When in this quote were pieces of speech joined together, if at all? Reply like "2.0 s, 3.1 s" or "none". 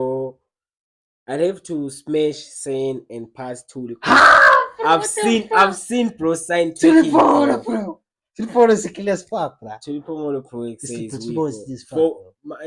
none